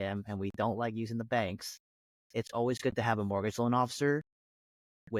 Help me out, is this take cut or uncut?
uncut